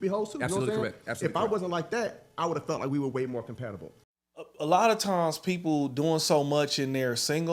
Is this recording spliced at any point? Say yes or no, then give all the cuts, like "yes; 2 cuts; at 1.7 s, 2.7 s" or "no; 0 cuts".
yes; 1 cut; at 4.3 s